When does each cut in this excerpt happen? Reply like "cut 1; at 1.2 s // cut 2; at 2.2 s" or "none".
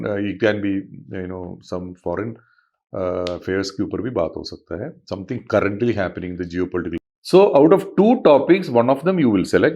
cut 1; at 7.0 s